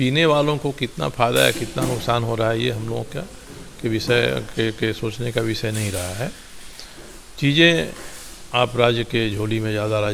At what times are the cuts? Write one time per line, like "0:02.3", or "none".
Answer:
none